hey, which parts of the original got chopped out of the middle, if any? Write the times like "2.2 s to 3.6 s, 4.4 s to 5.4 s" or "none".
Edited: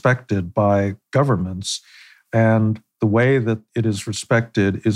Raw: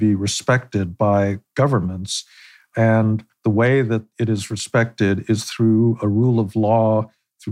none

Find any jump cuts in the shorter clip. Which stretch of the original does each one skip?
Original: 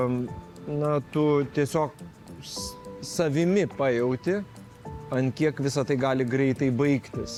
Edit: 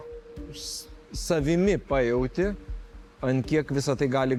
none

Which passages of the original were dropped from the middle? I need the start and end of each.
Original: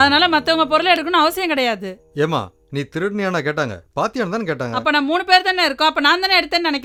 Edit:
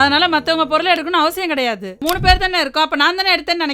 2.0 s to 5.1 s

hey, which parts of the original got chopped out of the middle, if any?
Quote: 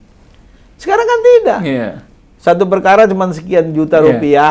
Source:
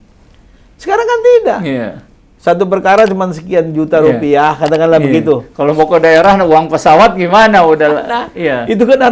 none

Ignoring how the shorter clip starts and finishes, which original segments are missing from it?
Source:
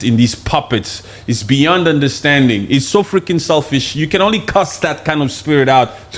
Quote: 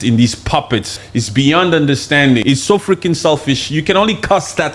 1.0 s to 1.1 s, 2.6 s to 2.7 s

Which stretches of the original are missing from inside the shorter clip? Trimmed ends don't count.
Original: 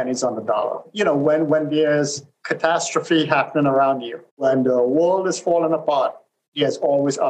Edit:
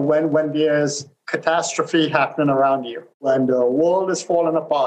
none

